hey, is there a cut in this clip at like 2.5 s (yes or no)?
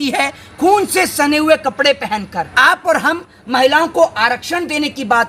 yes